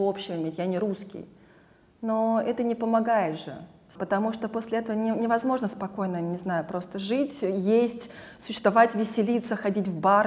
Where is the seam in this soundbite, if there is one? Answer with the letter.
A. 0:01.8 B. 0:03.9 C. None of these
B